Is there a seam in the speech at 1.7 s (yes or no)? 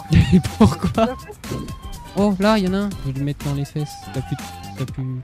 yes